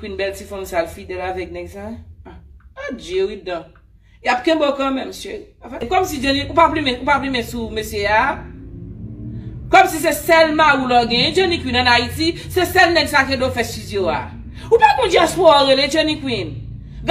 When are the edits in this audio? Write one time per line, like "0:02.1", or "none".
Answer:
0:05.8

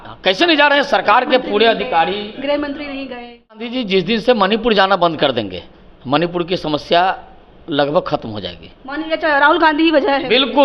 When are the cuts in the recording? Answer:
0:03.7

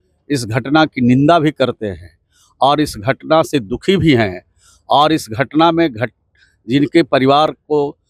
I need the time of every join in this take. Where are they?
none

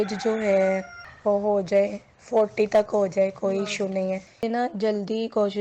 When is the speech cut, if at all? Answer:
none

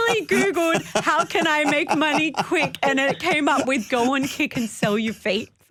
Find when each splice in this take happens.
none

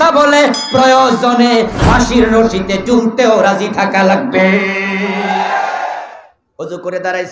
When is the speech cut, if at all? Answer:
0:06.0

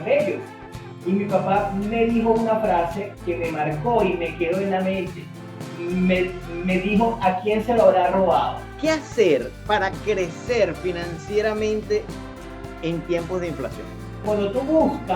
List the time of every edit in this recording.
0:08.7
0:14.2

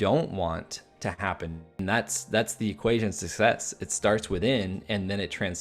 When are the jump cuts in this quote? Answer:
0:01.7

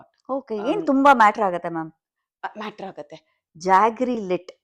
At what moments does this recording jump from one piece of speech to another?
0:03.5

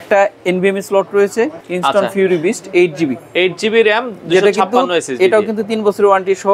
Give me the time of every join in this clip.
0:01.7

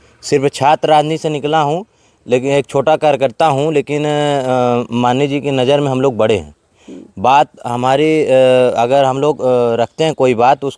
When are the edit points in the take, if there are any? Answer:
none

